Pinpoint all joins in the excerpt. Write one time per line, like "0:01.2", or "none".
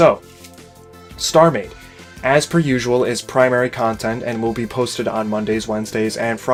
none